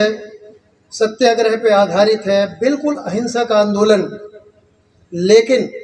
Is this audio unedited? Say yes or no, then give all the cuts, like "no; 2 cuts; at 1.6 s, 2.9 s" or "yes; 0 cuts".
yes; 0 cuts